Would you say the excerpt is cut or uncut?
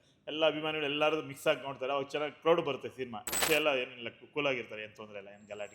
cut